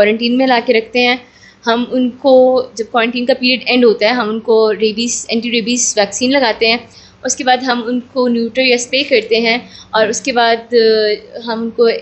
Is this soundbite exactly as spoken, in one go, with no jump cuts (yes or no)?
yes